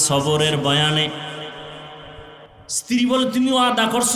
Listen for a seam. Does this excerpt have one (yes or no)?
yes